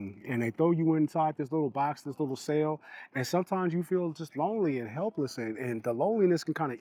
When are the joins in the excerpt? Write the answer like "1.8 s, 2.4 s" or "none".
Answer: none